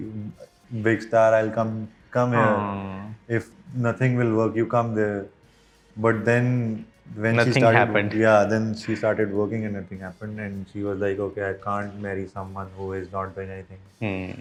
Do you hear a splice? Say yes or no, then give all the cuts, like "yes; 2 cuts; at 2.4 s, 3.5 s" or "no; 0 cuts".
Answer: no; 0 cuts